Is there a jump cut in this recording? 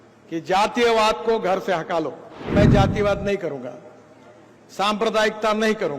yes; 1 cut; at 2.5 s

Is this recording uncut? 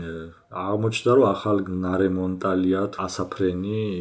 no; 1 cut; at 2.9 s

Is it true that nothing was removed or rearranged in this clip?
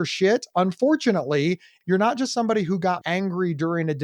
no; 2 cuts; at 1.7 s, 3.0 s

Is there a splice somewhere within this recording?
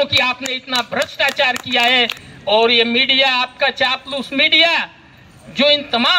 yes; 1 cut; at 2.2 s

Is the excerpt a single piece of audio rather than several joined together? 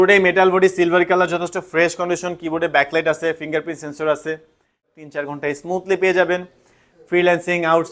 no; 1 cut; at 4.8 s

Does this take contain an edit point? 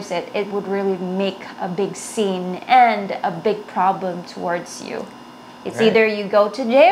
no; 0 cuts

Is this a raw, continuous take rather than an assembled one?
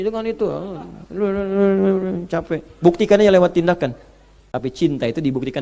no; 1 cut; at 4.4 s

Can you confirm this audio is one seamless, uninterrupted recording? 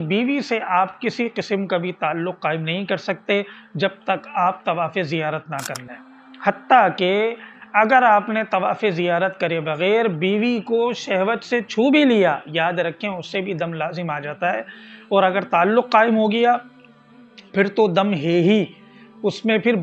yes; 0 cuts

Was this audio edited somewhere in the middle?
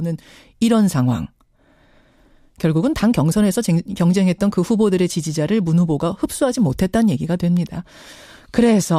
yes; 1 cut; at 3.6 s

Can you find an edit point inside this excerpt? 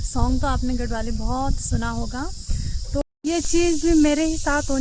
yes; 1 cut; at 3.0 s

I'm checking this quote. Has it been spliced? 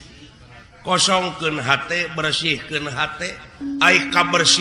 yes; 1 cut; at 3.4 s

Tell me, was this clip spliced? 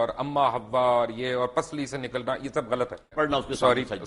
yes; 1 cut; at 3.1 s

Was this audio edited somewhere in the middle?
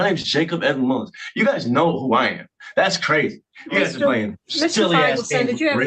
no; 0 cuts

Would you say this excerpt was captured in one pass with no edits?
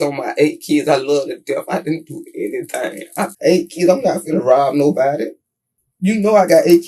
no; 1 cut; at 3.3 s

